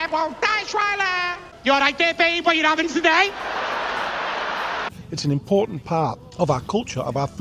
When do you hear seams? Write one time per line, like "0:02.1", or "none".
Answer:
0:01.5
0:05.0
0:06.2